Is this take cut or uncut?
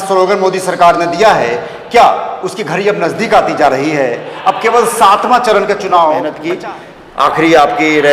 cut